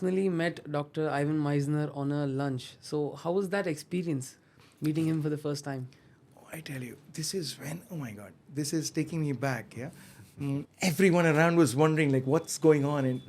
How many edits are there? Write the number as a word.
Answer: one